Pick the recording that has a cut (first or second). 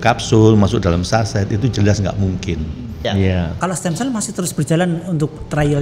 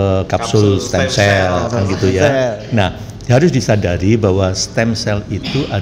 first